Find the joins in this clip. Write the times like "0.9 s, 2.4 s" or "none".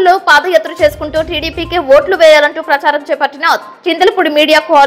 none